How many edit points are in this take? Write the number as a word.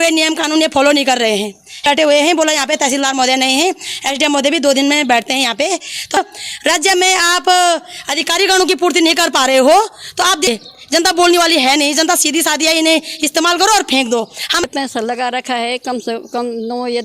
four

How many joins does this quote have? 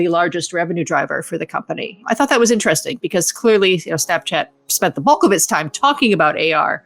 one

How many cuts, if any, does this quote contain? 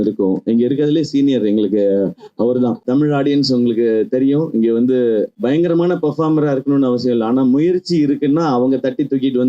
two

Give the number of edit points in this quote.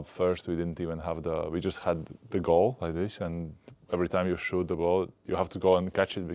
zero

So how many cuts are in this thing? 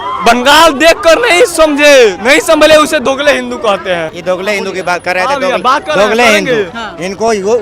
one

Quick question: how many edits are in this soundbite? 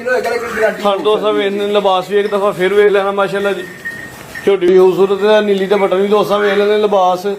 one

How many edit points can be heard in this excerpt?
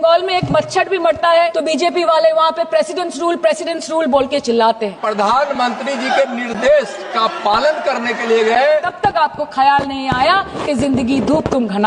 three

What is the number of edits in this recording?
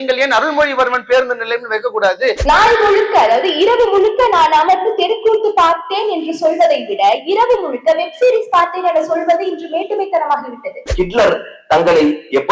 two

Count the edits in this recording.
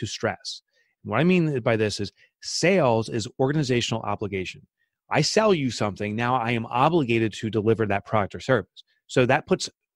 zero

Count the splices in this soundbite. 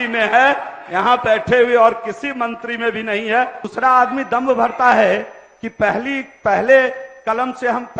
one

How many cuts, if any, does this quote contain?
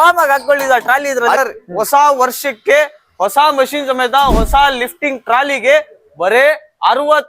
one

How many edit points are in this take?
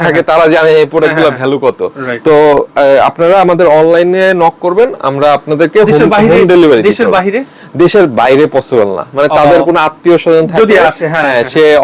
zero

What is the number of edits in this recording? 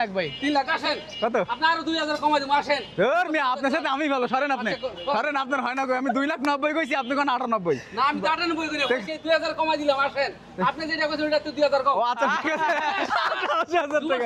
zero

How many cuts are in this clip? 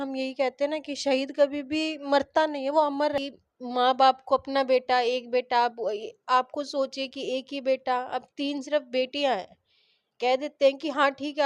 one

